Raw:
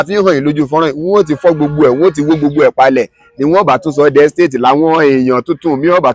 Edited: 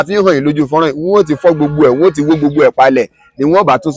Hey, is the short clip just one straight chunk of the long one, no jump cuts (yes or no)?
yes